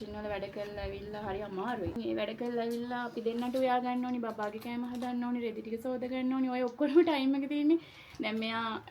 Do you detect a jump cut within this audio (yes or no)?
yes